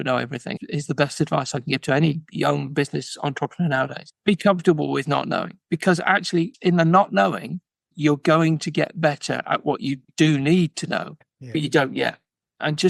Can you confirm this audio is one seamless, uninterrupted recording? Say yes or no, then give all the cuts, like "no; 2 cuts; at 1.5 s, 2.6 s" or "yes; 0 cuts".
yes; 0 cuts